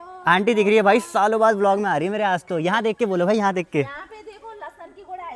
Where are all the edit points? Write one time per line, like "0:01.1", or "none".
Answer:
none